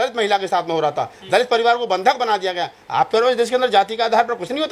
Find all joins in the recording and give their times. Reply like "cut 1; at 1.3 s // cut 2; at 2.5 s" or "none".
none